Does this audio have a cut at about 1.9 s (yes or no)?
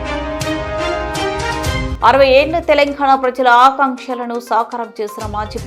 yes